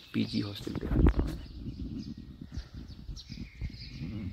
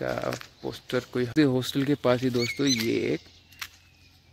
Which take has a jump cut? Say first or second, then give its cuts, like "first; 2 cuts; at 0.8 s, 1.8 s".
second; 1 cut; at 1.3 s